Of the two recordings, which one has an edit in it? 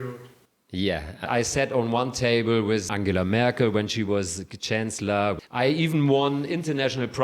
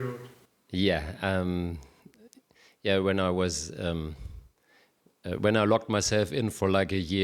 first; 3 cuts; at 1.3 s, 2.9 s, 5.4 s

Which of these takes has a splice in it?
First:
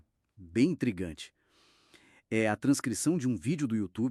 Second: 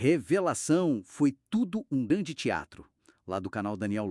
second; 1 cut; at 2.1 s

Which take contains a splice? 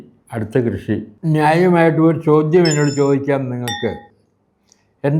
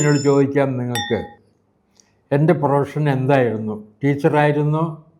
first; 1 cut; at 1.1 s

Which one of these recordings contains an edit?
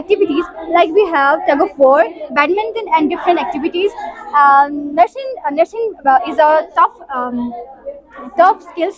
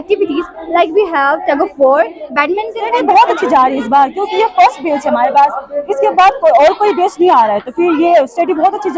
second; 1 cut; at 2.9 s

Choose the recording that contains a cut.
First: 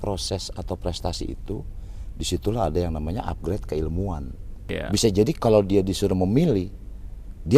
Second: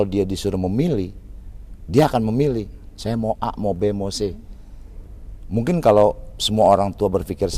first; 1 cut; at 4.5 s

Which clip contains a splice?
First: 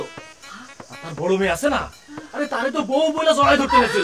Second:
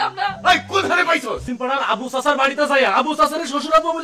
second; 1 cut; at 1.4 s

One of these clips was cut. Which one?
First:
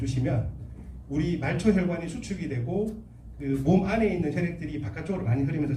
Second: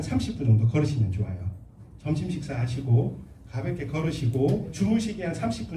second; 1 cut; at 4.7 s

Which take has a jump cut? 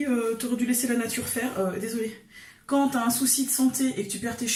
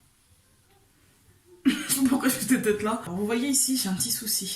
second; 1 cut; at 3.1 s

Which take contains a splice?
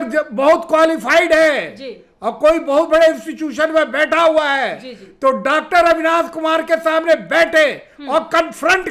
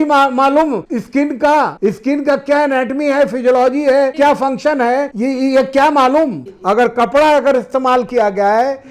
second; 5 cuts; at 0.9 s, 1.7 s, 4.1 s, 5.1 s, 6.5 s

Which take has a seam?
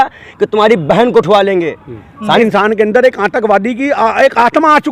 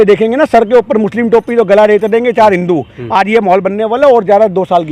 first; 1 cut; at 2.4 s

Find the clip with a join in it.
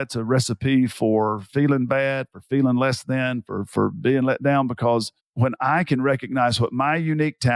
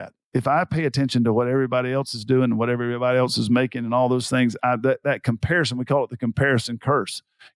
first; 1 cut; at 5.2 s

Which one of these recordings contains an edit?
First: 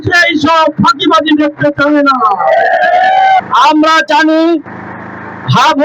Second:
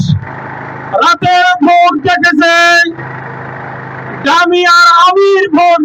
first; 1 cut; at 3.4 s

